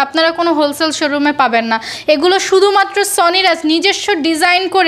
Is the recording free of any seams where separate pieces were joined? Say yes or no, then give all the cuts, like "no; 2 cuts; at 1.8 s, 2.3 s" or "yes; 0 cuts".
yes; 0 cuts